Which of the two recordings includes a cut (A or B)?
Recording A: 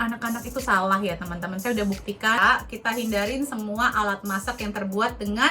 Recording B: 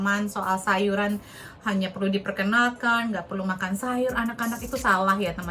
A